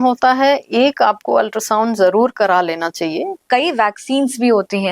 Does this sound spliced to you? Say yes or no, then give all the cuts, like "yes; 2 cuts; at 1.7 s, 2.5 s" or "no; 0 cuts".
yes; 1 cut; at 3.5 s